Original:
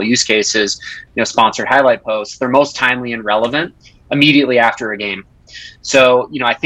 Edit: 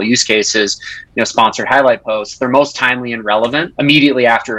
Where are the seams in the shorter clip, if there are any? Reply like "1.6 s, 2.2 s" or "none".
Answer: 3.7 s